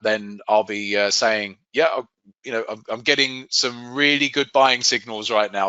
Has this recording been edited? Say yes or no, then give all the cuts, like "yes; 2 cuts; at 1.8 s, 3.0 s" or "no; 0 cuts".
no; 0 cuts